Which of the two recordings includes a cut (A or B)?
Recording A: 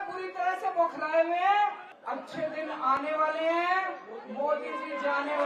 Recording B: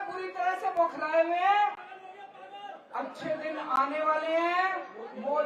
A